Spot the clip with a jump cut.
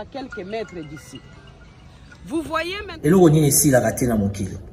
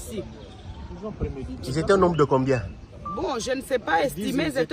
first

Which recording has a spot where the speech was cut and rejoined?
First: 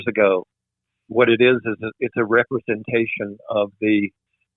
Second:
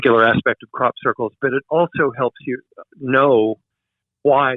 first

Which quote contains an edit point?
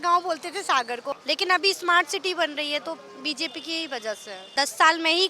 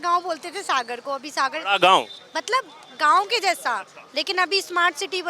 first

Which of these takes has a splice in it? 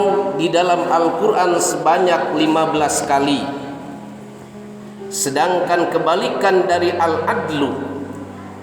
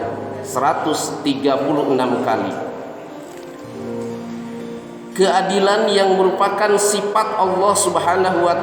first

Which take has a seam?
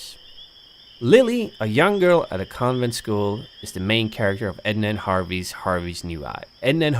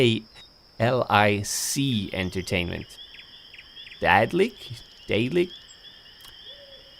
first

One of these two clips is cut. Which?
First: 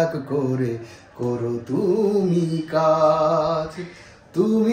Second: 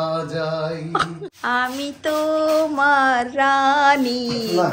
second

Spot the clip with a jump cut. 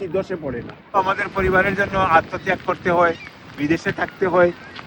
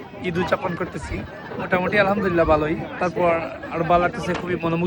first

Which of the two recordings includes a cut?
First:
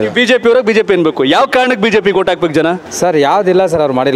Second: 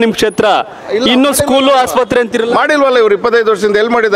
first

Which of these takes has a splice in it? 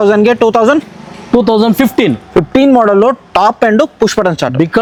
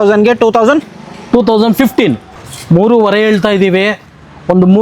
second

